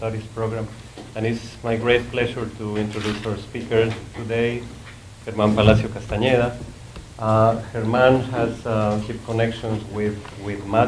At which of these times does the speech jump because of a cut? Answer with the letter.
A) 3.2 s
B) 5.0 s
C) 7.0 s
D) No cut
C